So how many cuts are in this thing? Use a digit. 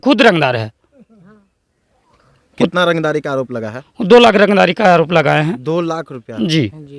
0